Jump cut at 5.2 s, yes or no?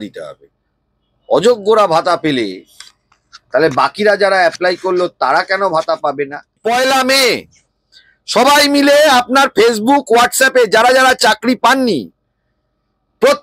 no